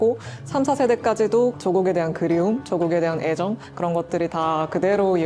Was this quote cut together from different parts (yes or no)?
yes